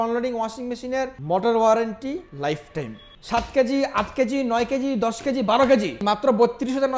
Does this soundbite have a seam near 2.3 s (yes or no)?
yes